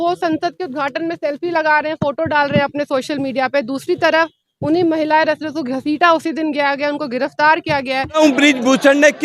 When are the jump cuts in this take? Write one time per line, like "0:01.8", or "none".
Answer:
0:08.2